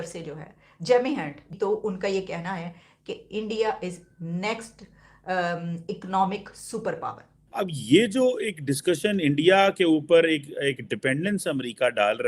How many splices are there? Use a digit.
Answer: 2